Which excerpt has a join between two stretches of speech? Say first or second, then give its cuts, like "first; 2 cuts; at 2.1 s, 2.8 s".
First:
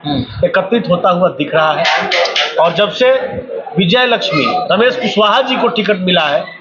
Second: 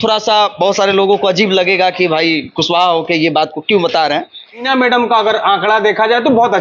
second; 1 cut; at 4.7 s